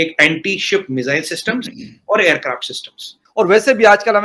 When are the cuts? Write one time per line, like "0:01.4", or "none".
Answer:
0:03.2